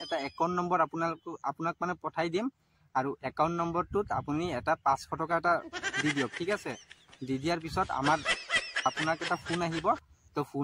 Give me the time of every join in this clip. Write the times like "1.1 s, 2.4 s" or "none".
none